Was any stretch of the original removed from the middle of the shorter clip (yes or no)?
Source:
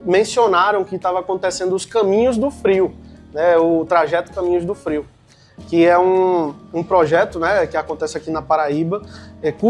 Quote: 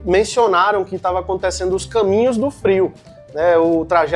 no